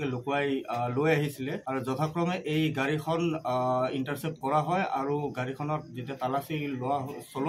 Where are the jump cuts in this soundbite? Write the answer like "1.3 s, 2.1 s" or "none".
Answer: none